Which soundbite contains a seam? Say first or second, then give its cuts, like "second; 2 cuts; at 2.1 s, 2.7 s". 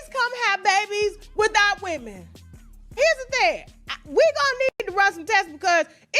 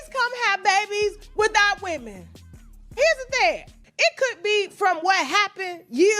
second; 1 cut; at 3.9 s